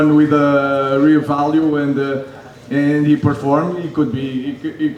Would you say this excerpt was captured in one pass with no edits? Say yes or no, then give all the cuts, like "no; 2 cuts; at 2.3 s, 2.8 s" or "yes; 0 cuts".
yes; 0 cuts